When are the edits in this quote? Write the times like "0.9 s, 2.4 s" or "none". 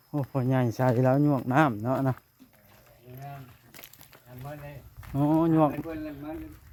none